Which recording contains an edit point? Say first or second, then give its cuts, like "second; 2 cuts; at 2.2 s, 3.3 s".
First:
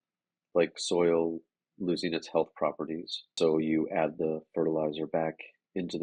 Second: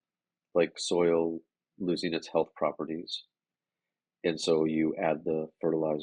first; 1 cut; at 3.3 s